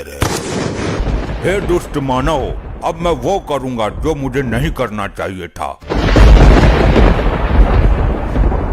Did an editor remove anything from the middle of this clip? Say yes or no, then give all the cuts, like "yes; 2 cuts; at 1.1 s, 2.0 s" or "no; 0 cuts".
yes; 2 cuts; at 1.0 s, 5.8 s